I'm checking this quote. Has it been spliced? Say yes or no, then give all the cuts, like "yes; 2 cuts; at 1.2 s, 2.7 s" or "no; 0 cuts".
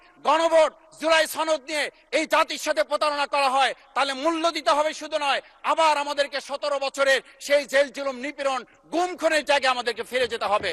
no; 0 cuts